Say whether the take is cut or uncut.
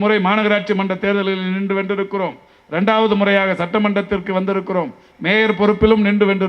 uncut